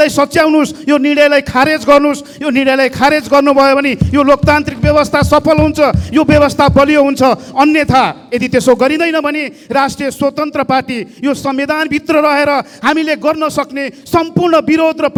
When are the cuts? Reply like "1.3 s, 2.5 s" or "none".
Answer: none